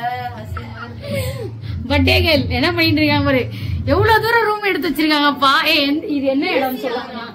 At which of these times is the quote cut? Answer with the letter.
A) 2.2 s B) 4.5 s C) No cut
C